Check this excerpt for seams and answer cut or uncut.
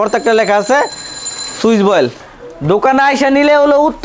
cut